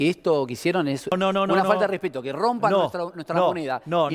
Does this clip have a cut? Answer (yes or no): yes